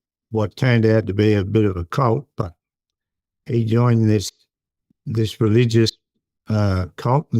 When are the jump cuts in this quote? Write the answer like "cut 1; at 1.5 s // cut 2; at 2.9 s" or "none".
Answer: none